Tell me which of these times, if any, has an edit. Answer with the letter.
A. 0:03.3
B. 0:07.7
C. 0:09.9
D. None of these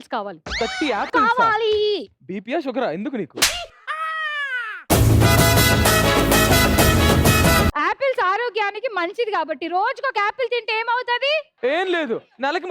B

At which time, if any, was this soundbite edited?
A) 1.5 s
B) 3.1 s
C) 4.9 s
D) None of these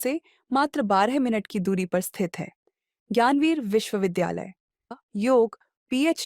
C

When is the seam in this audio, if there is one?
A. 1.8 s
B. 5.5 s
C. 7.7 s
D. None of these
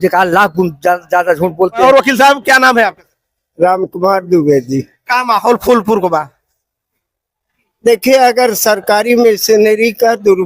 A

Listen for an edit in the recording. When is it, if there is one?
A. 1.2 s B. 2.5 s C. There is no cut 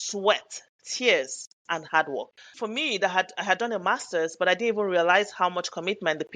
B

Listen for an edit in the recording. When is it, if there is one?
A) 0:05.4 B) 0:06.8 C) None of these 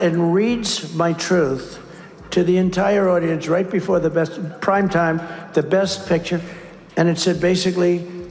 C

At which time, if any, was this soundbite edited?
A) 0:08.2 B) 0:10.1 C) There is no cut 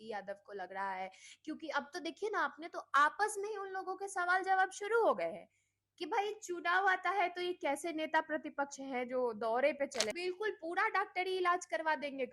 B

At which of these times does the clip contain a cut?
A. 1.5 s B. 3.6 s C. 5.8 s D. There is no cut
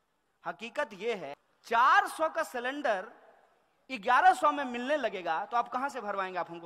A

